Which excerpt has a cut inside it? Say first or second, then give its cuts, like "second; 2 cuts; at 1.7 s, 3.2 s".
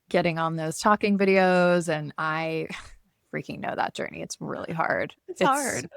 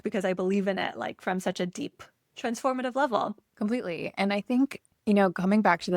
second; 2 cuts; at 3.4 s, 4.9 s